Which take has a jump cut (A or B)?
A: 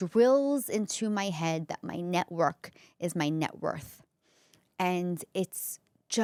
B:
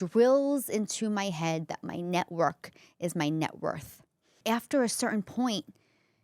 B